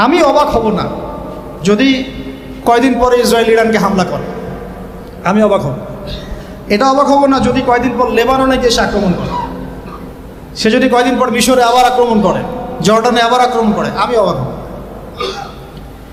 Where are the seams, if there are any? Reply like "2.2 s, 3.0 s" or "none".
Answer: none